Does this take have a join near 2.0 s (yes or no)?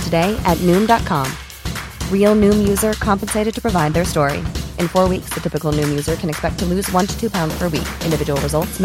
no